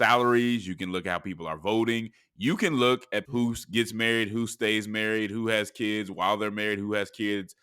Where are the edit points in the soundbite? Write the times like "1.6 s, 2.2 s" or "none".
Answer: 3.2 s

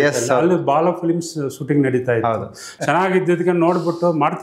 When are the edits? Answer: 2.6 s

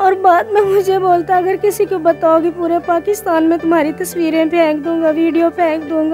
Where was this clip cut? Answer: none

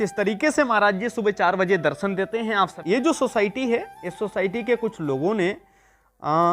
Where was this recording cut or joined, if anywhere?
2.8 s

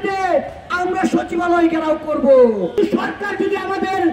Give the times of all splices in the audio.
2.7 s

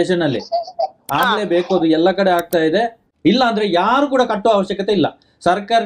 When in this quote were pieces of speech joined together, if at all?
3.0 s

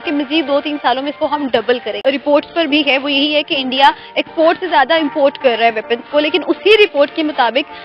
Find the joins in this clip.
2.0 s

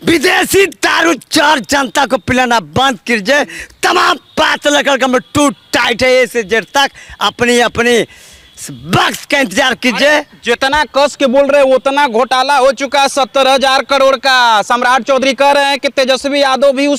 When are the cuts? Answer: none

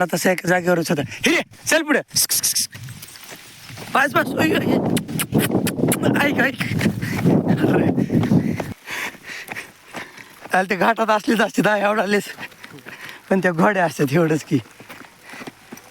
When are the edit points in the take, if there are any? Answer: 8.7 s

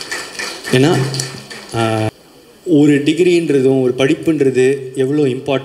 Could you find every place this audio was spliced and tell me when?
2.1 s

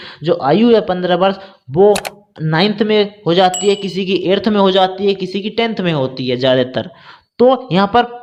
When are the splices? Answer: none

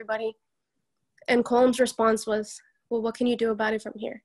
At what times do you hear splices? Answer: none

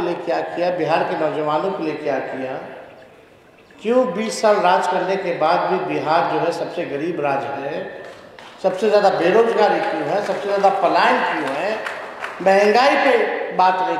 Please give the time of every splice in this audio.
none

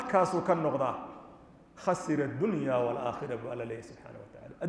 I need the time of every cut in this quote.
none

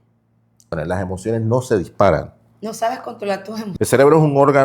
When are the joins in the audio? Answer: 0.7 s, 3.7 s

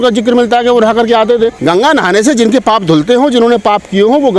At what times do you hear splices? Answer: 1.6 s

